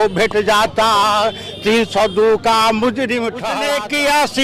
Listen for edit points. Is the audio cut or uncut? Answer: cut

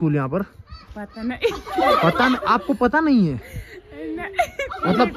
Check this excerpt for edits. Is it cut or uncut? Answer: uncut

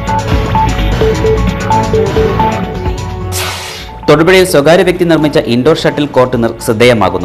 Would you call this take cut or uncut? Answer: cut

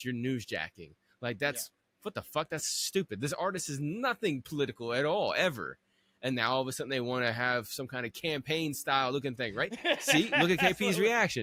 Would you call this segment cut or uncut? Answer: uncut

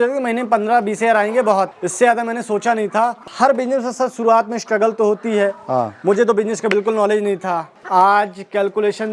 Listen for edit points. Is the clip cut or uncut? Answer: cut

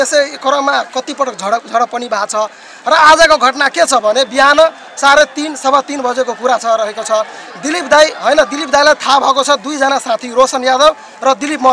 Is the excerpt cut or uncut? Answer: uncut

